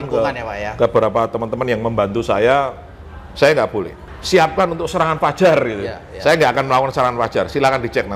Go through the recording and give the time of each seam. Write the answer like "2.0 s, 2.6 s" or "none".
4.0 s